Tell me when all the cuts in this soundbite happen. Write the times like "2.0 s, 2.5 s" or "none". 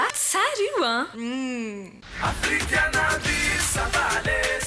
2.0 s